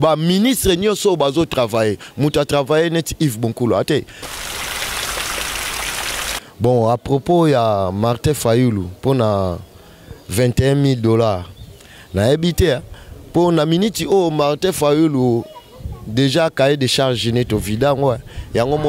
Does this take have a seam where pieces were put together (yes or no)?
yes